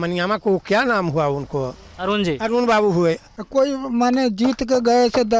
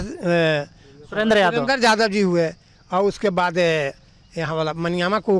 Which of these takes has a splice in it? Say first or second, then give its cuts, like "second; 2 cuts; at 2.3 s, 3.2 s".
first; 1 cut; at 3.3 s